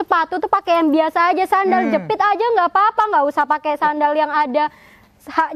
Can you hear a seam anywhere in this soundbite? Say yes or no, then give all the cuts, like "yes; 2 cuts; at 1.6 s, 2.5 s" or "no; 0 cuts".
no; 0 cuts